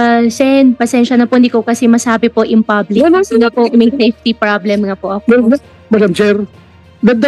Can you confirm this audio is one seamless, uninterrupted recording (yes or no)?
yes